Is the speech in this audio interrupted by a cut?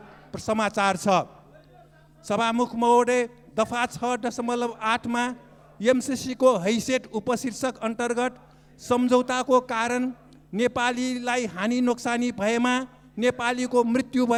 no; 0 cuts

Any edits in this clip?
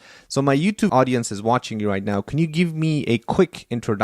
yes; 1 cut; at 0.9 s

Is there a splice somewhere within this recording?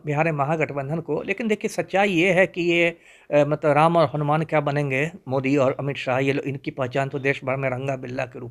no; 0 cuts

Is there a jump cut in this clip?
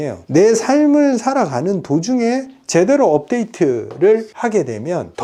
no; 0 cuts

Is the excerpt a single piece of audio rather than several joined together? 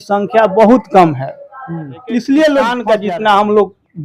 no; 1 cut; at 2.9 s

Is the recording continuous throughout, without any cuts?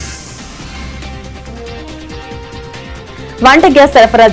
no; 1 cut; at 3.4 s

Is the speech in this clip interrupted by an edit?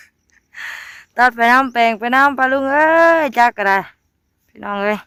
no; 0 cuts

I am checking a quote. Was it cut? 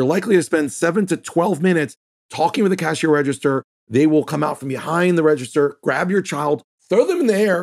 no; 0 cuts

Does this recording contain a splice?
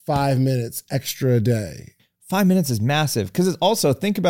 yes; 1 cut; at 2.0 s

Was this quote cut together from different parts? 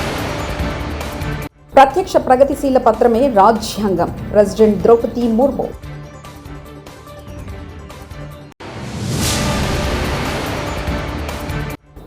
no; 0 cuts

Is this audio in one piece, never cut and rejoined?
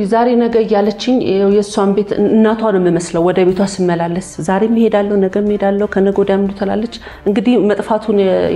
yes; 0 cuts

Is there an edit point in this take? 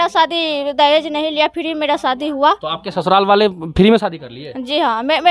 no; 0 cuts

